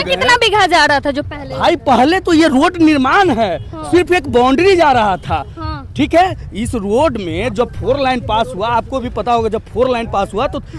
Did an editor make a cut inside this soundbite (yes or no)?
no